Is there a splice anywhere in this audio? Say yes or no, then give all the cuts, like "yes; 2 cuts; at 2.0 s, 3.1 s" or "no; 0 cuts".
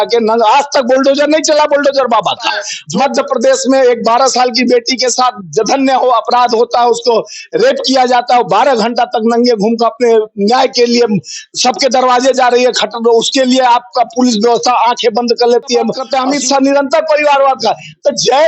yes; 2 cuts; at 2.8 s, 16.0 s